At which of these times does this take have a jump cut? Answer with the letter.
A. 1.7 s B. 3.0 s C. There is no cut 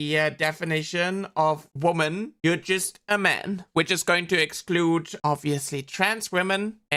C